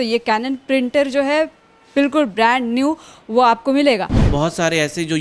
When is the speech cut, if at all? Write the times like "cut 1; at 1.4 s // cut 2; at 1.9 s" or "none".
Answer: cut 1; at 4.2 s